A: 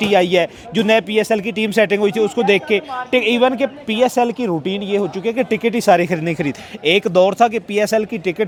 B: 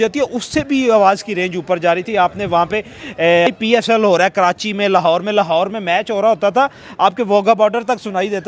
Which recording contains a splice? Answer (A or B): B